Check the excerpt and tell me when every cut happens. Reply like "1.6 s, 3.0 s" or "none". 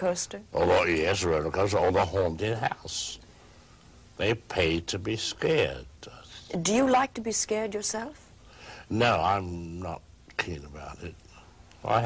none